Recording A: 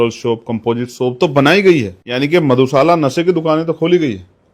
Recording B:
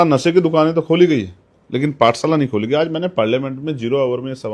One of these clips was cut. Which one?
A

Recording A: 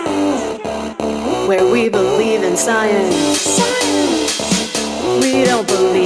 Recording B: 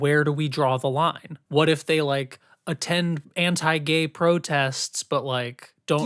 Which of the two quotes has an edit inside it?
B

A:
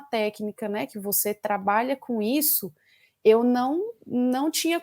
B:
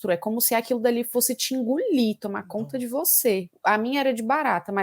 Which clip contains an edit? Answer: B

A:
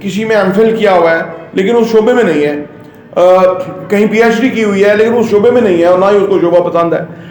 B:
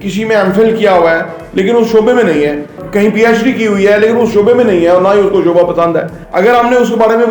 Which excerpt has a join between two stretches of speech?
B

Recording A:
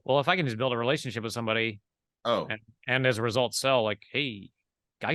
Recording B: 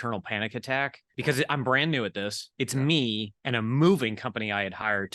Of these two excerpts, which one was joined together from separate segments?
B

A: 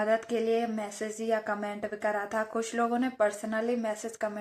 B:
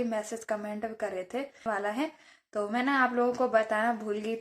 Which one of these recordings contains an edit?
B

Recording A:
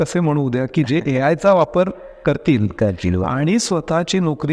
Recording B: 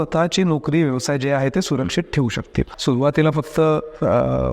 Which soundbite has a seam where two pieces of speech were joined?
B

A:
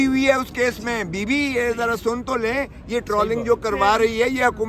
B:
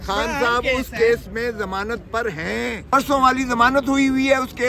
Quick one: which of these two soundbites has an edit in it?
B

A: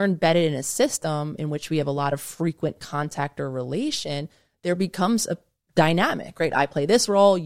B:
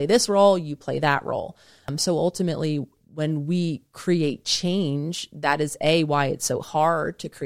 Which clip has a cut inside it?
B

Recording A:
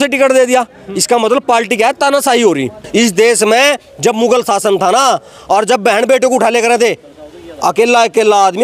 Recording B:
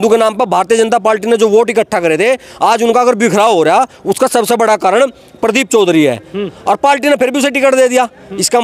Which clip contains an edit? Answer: A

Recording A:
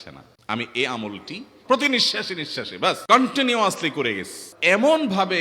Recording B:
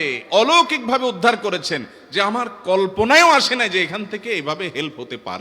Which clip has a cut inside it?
A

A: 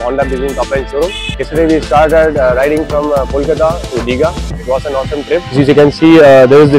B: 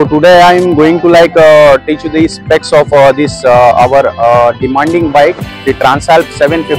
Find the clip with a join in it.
A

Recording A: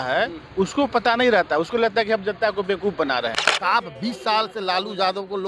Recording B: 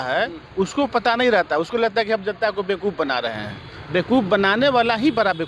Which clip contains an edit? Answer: A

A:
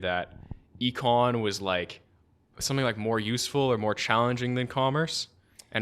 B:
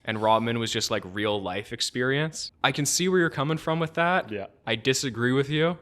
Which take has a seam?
B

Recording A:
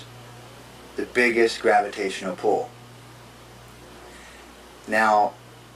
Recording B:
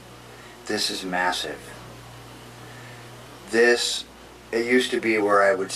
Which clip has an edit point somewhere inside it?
B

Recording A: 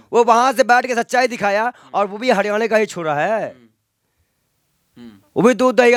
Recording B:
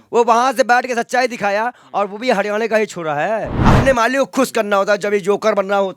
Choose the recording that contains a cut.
B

